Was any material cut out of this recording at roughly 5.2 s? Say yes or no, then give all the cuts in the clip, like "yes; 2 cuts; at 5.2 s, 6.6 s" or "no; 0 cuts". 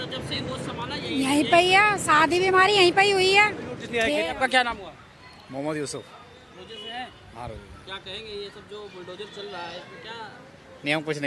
no; 1 cut; at 3.9 s